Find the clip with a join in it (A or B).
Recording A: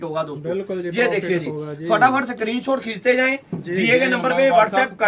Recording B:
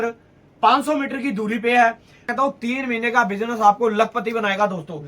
B